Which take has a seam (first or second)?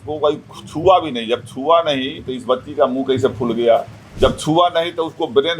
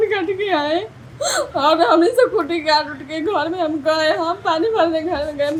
first